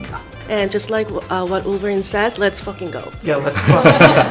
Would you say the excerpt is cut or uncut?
uncut